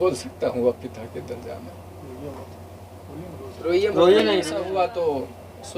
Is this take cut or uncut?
cut